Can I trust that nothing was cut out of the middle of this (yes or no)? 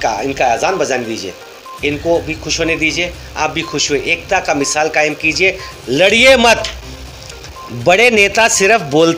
yes